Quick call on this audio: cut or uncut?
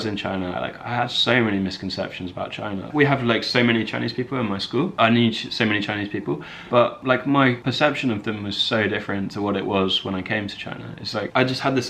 uncut